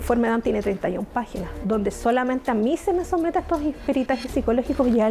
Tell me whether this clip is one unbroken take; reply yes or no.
yes